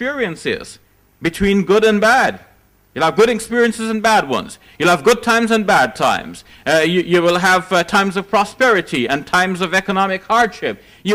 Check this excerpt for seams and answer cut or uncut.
uncut